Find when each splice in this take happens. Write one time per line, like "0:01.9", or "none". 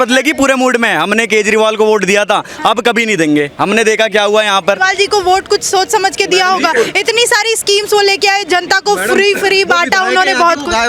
none

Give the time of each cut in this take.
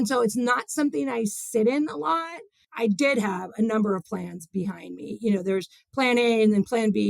0:02.6

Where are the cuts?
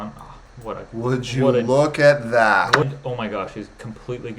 0:02.8

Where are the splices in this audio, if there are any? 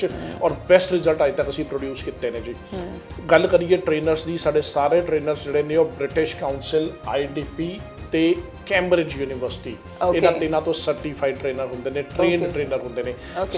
none

